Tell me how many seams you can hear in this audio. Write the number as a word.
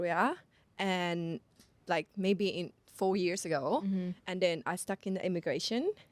zero